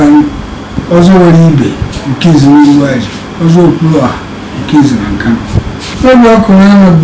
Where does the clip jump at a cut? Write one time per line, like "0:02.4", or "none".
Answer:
0:05.9